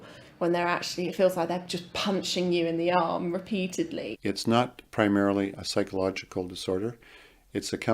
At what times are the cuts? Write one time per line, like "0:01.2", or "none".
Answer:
0:04.1